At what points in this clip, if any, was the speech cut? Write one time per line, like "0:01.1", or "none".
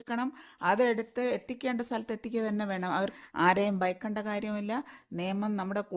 0:03.1